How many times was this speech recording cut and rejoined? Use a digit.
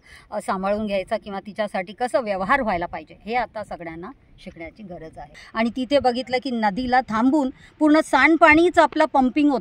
1